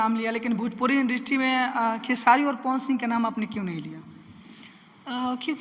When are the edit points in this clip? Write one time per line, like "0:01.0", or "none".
none